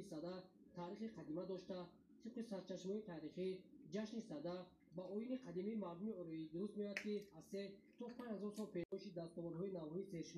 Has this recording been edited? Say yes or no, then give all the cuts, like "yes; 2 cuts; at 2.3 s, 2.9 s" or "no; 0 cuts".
no; 0 cuts